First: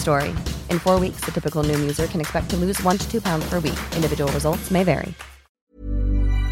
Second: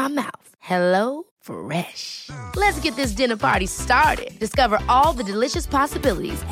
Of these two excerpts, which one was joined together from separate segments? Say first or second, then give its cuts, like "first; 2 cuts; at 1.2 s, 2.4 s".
first; 1 cut; at 5.6 s